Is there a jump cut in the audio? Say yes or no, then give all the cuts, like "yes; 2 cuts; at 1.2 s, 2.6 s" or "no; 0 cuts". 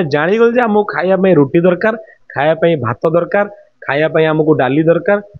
no; 0 cuts